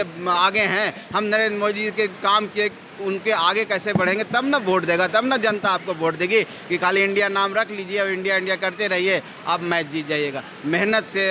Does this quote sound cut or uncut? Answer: uncut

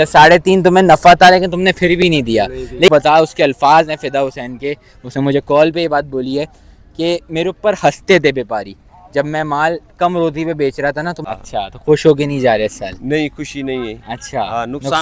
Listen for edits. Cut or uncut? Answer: cut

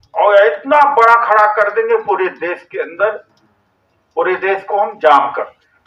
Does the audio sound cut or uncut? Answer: uncut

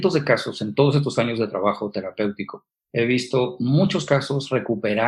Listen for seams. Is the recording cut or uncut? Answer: uncut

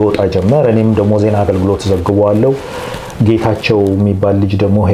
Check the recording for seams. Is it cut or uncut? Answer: uncut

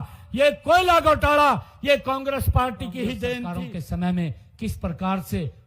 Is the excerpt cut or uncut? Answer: cut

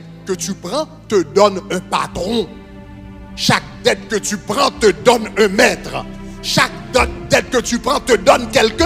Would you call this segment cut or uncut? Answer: uncut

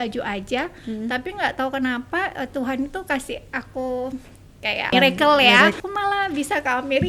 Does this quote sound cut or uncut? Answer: cut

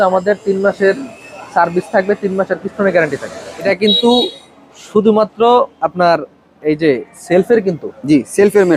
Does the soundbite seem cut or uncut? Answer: uncut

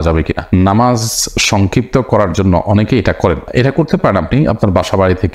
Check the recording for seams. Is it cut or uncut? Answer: uncut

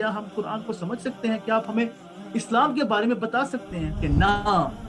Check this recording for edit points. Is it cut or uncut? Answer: cut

